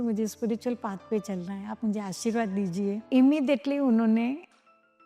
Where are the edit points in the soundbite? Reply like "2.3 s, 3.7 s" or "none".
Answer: 3.0 s